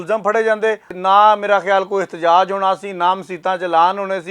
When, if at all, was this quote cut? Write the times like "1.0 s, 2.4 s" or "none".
0.9 s